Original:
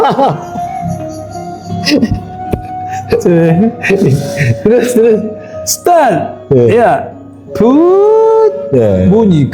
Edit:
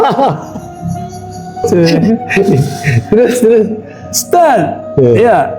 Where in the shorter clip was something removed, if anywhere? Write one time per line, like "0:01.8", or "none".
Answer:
0:01.6